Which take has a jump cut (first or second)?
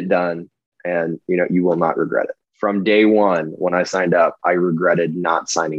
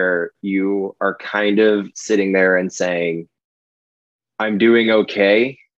first